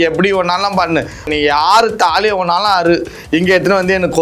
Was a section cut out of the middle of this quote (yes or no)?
yes